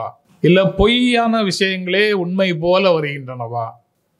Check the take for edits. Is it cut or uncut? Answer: uncut